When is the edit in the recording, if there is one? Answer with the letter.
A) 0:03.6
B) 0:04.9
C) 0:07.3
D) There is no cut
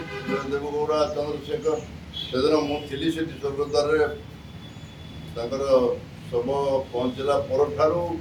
D